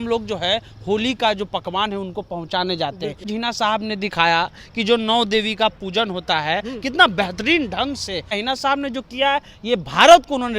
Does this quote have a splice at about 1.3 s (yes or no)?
no